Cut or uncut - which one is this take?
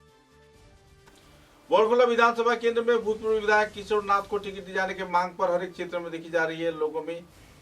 cut